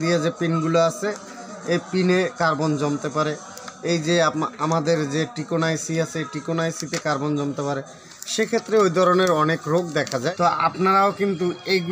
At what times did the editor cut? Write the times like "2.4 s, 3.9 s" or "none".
10.3 s